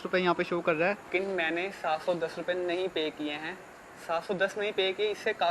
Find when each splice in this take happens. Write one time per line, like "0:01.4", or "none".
0:01.1